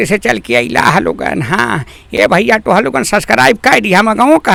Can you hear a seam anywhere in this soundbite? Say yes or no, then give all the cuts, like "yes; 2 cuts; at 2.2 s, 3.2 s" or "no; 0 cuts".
no; 0 cuts